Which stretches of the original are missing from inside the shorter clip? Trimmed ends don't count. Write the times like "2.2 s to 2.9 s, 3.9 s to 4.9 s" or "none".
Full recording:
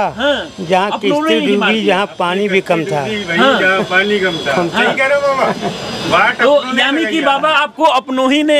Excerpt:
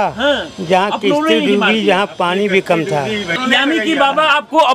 3.4 s to 6.6 s

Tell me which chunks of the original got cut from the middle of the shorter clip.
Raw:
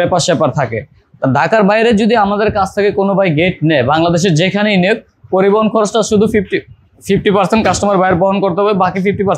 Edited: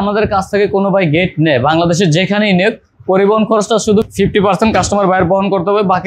6.3 s to 7.0 s

